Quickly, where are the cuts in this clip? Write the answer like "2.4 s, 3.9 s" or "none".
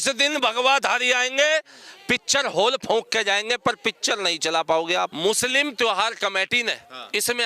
5.1 s